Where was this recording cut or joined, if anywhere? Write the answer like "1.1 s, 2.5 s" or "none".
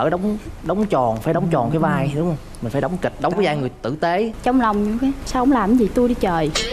4.3 s